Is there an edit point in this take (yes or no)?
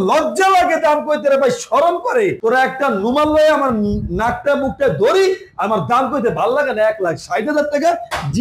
no